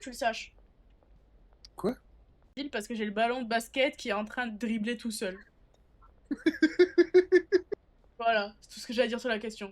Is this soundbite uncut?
no; 1 cut; at 2.6 s

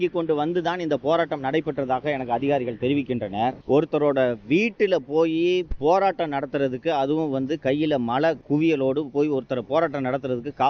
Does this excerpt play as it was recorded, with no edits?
no; 1 cut; at 8.4 s

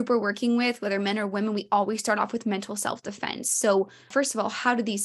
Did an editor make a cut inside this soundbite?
yes; 1 cut; at 4.1 s

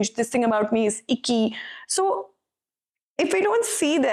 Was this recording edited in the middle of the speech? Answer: no; 0 cuts

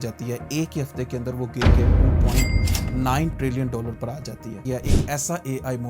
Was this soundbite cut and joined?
yes; 1 cut; at 4.6 s

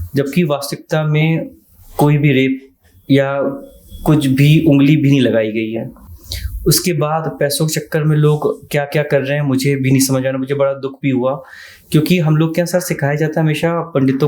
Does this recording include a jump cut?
no; 0 cuts

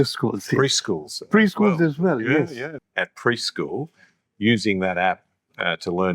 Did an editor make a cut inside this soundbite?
yes; 1 cut; at 2.6 s

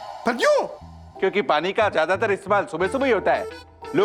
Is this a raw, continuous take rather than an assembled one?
yes; 0 cuts

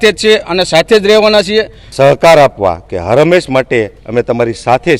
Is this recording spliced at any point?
yes; 1 cut; at 1.8 s

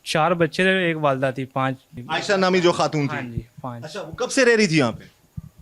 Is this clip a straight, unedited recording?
no; 1 cut; at 1.9 s

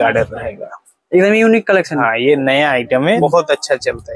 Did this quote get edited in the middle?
yes; 1 cut; at 3.2 s

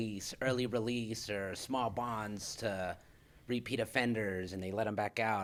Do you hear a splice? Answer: no; 0 cuts

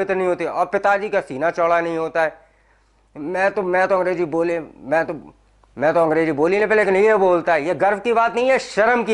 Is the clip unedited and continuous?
yes; 0 cuts

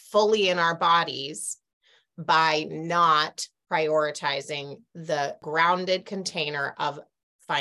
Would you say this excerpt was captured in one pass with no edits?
no; 1 cut; at 5.4 s

